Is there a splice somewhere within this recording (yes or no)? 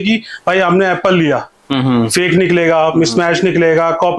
no